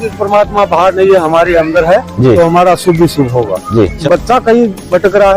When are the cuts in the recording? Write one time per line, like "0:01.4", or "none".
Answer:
0:04.0

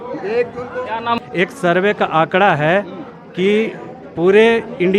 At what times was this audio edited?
0:01.2

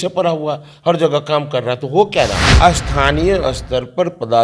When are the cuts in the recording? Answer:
0:02.4

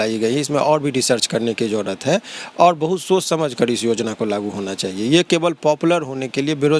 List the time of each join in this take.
none

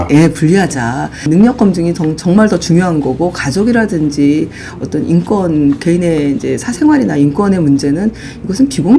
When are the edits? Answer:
0:01.3

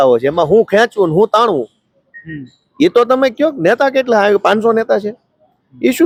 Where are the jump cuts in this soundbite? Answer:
none

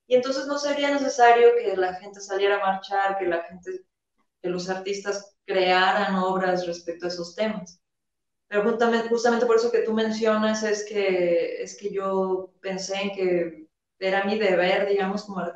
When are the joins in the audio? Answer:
none

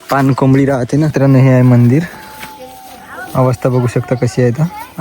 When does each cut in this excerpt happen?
0:01.1

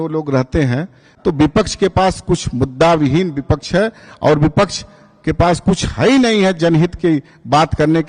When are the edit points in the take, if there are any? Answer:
0:01.1

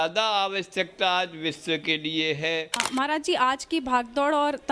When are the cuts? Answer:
0:02.9

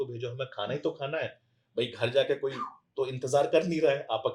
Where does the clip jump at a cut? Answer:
none

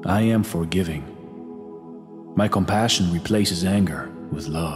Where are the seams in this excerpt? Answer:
none

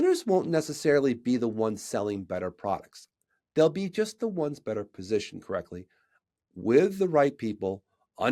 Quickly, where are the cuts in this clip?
none

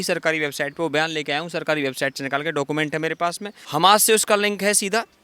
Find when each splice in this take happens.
0:03.5

